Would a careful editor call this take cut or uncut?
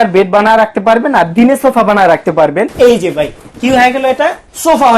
cut